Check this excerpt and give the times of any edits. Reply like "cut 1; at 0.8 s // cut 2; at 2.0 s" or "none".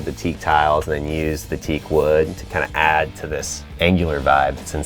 cut 1; at 3.7 s